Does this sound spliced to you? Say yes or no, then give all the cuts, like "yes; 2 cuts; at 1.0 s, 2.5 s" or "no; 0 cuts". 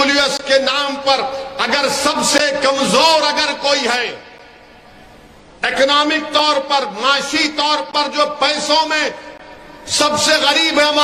no; 0 cuts